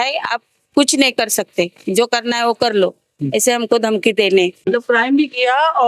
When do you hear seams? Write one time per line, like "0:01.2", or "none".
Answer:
0:04.7